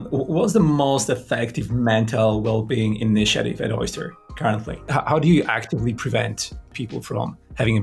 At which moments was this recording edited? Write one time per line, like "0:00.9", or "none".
0:04.8
0:06.7